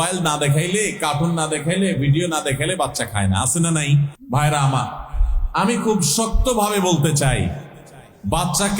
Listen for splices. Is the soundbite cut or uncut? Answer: cut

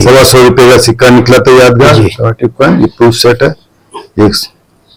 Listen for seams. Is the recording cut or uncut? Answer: uncut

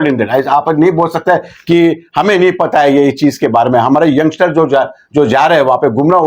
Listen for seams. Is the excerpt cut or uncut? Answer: uncut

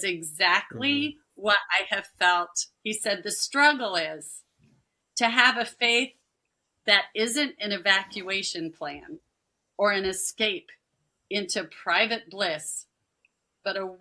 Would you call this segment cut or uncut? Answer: cut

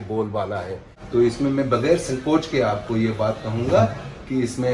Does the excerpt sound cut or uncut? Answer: cut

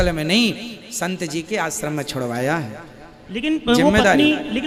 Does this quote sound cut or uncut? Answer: uncut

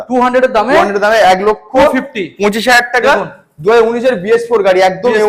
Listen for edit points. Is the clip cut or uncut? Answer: uncut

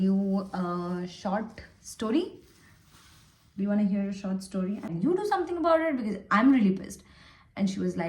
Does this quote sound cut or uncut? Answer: cut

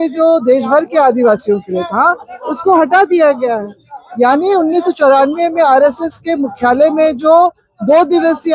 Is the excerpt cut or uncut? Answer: uncut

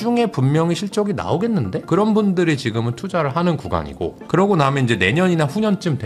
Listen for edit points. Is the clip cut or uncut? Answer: cut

